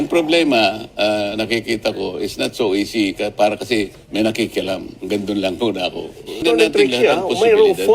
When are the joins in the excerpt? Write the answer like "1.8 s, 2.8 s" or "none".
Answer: 6.4 s